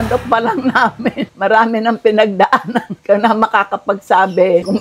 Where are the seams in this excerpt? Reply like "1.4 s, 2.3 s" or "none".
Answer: 1.3 s, 2.9 s